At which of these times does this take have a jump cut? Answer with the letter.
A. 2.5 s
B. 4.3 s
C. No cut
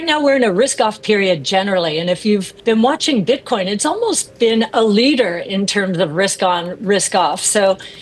A